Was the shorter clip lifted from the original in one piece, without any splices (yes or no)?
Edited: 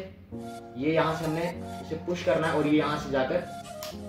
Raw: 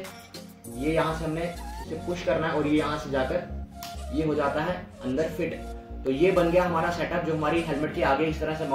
yes